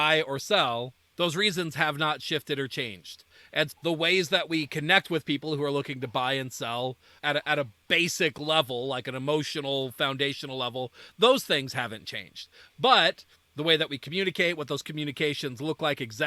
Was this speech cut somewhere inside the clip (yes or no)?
yes